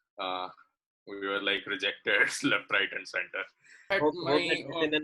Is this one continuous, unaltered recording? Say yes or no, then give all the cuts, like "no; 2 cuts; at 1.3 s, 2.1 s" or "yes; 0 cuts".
no; 1 cut; at 3.9 s